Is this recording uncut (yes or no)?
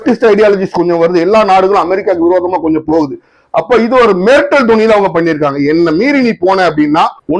yes